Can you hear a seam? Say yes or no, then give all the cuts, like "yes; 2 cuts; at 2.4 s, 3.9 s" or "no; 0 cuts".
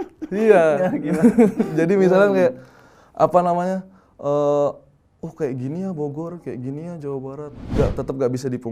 yes; 1 cut; at 7.6 s